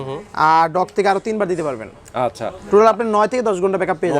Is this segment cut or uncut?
uncut